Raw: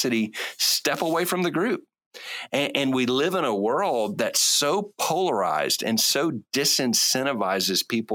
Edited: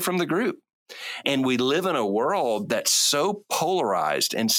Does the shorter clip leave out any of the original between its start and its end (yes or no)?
yes